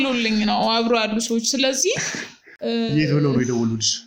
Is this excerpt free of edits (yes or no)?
yes